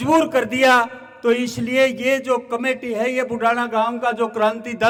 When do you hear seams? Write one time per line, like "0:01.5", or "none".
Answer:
none